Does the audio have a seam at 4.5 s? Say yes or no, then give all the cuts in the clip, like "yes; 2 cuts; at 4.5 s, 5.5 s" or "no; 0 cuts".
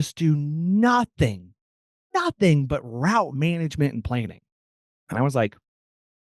no; 0 cuts